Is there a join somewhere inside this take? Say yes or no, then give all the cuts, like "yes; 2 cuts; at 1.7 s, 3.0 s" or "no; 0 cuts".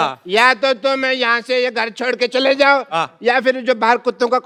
no; 0 cuts